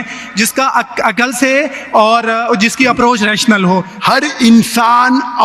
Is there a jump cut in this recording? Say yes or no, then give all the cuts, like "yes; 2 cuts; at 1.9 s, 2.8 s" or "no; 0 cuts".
yes; 1 cut; at 3.9 s